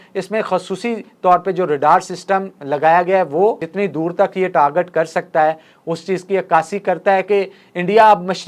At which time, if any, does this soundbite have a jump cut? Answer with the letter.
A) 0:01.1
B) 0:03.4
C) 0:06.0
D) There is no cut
D